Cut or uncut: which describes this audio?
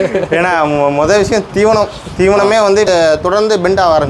cut